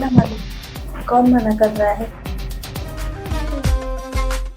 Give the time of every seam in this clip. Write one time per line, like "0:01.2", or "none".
0:03.3